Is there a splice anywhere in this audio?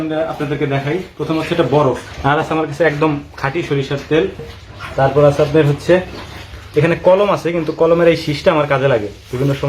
yes; 1 cut; at 2.1 s

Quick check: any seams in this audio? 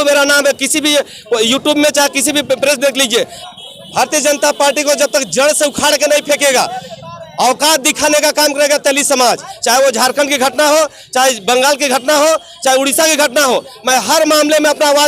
yes; 2 cuts; at 3.4 s, 9.5 s

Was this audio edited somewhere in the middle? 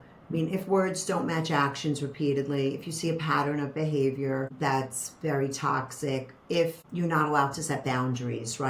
yes; 2 cuts; at 4.5 s, 6.8 s

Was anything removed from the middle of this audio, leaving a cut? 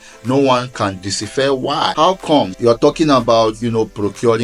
yes; 2 cuts; at 1.9 s, 2.5 s

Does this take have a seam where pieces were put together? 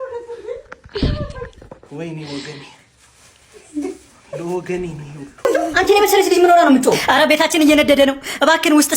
yes; 1 cut; at 5.5 s

